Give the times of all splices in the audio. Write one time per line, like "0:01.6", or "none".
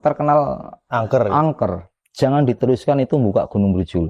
0:01.9

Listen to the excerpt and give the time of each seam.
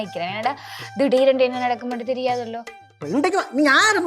0:03.0

